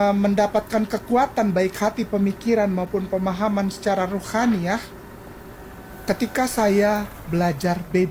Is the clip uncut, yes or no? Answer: yes